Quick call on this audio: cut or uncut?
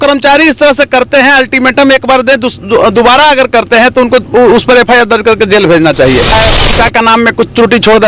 cut